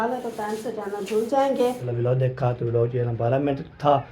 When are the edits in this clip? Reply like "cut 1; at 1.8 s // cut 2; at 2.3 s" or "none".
cut 1; at 1.8 s